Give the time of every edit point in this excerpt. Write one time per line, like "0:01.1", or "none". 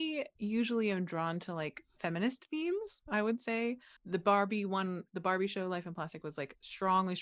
0:01.9
0:03.9